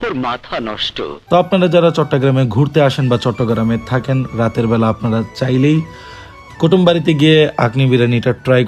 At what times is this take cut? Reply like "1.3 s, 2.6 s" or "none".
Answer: 1.1 s